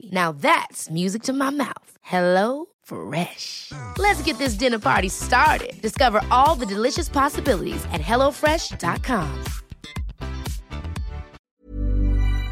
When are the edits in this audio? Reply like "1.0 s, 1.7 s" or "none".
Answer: 11.3 s